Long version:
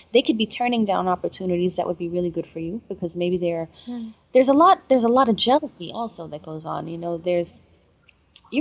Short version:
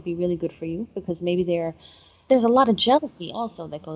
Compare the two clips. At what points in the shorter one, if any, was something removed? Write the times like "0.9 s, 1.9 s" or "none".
2.2 s